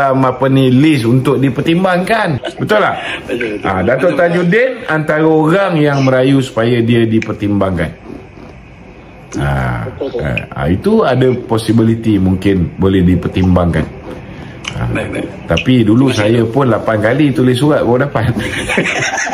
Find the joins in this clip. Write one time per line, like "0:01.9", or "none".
0:02.5